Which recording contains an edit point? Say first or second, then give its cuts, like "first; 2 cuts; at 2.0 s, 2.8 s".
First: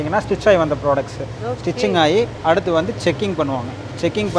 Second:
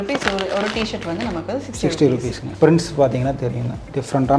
second; 1 cut; at 2.4 s